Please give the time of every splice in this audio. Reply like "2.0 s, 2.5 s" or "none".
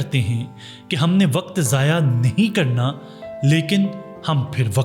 none